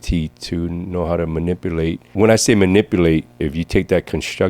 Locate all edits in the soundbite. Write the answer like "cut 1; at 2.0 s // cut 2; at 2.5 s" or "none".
cut 1; at 2.0 s // cut 2; at 3.3 s